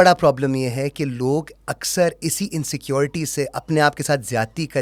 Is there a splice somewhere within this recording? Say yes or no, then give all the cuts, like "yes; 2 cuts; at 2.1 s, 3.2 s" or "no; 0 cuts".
no; 0 cuts